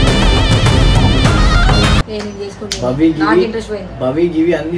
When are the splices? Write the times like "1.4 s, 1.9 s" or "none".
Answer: none

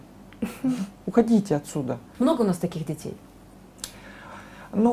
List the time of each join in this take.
2.0 s

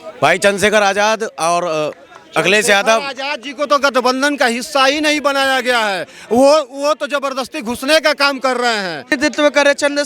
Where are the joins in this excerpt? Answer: 9.2 s

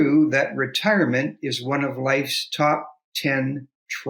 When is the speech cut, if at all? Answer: none

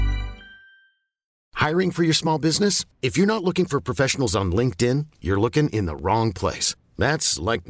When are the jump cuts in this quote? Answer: 1.4 s

